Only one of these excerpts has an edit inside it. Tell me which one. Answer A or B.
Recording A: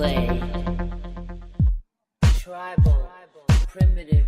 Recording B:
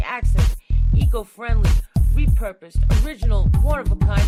A